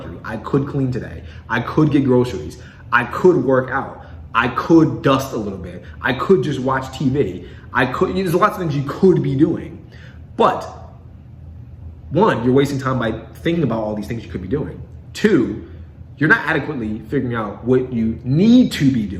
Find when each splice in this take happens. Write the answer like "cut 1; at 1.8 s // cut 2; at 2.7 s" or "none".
none